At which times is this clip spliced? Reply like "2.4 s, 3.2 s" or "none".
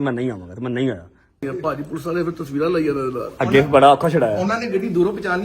1.4 s